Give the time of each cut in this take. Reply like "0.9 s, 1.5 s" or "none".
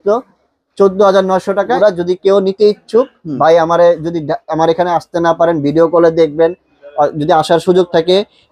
1.7 s